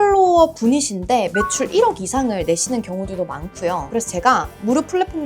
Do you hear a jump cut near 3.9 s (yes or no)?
yes